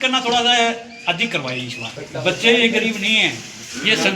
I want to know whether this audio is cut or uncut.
cut